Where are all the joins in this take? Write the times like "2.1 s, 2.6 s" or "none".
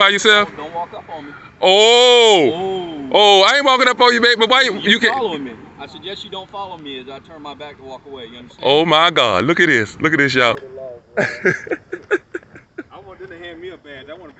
10.7 s